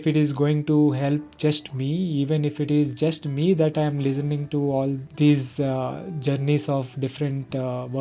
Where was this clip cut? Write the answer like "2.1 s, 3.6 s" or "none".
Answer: none